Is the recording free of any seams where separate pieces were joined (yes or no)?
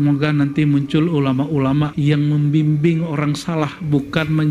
yes